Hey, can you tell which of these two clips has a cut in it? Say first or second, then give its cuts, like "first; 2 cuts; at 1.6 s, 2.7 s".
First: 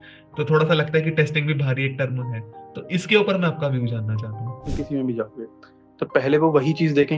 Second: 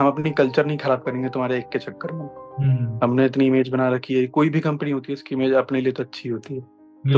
first; 1 cut; at 4.7 s